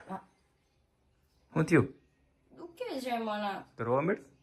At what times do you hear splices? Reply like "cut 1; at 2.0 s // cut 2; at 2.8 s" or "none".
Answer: none